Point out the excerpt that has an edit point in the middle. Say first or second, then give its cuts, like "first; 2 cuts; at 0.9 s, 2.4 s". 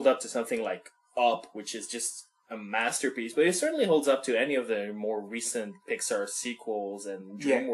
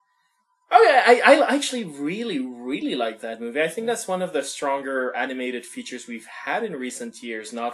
second; 1 cut; at 5.7 s